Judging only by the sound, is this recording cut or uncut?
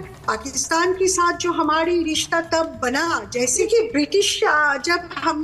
cut